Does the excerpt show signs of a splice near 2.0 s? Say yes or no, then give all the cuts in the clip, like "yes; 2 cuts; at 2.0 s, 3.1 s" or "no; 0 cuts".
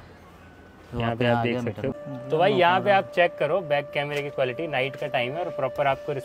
yes; 1 cut; at 2.0 s